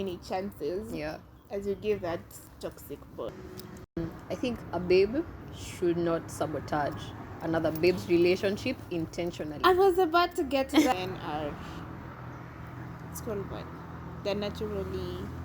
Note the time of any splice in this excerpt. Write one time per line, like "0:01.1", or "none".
0:03.3
0:10.9